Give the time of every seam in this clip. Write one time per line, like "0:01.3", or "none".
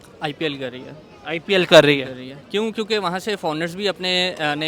none